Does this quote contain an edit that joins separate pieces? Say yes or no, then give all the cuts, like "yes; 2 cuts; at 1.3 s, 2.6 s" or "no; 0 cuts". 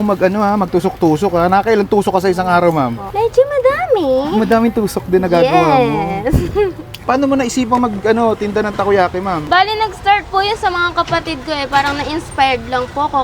yes; 1 cut; at 6.9 s